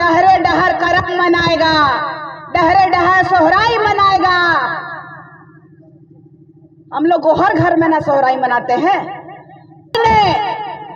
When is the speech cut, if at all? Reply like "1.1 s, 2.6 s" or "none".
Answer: 10.0 s